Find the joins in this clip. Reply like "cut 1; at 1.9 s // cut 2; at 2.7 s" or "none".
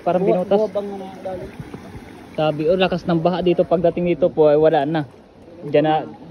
none